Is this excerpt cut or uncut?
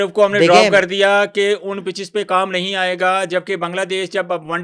uncut